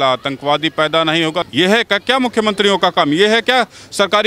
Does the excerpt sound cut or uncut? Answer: cut